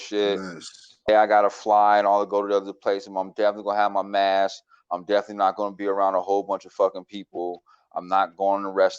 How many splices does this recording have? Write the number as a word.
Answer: one